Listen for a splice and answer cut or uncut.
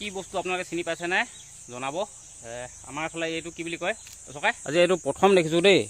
cut